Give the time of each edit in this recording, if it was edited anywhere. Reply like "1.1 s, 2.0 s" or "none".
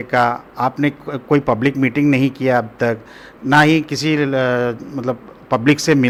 none